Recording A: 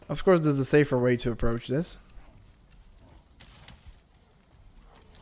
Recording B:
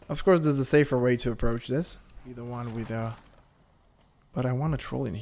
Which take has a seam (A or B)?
B